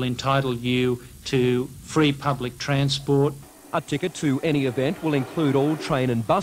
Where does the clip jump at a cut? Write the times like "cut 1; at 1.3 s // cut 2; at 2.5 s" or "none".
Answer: cut 1; at 2.0 s